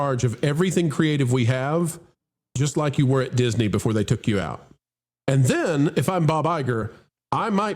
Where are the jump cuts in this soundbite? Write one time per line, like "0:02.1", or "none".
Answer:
none